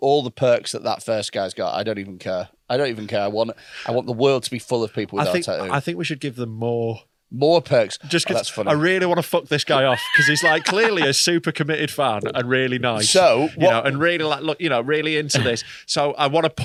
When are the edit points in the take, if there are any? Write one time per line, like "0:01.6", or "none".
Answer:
none